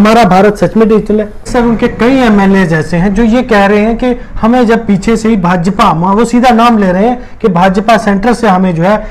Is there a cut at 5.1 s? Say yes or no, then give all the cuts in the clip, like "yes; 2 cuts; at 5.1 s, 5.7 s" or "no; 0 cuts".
no; 1 cut; at 1.5 s